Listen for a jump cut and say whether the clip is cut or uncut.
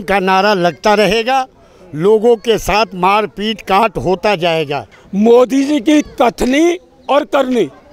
cut